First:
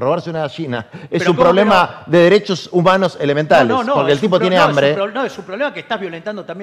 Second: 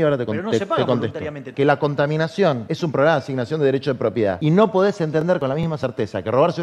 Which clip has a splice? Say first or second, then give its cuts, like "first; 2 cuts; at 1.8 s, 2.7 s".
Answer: second; 3 cuts; at 1.4 s, 2.7 s, 4.4 s